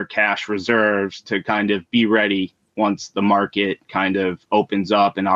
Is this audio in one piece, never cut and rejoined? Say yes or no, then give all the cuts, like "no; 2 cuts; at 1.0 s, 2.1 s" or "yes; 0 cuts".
yes; 0 cuts